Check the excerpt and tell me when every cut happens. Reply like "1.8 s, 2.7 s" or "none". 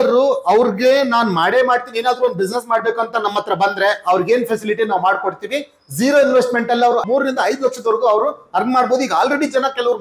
7.0 s